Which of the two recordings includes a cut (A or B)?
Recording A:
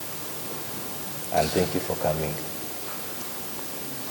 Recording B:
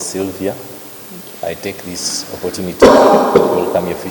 B